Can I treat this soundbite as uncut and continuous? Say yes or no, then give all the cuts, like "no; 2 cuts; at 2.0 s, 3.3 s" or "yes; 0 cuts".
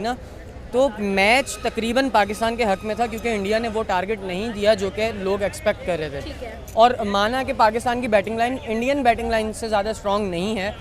yes; 0 cuts